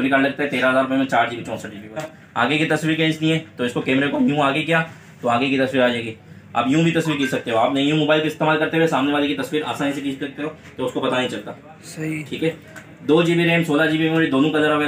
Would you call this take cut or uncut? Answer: cut